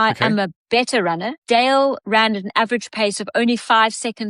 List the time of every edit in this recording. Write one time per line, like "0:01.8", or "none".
0:01.3
0:02.0